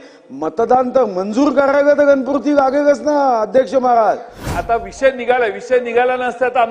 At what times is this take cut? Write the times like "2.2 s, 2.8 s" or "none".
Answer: 4.5 s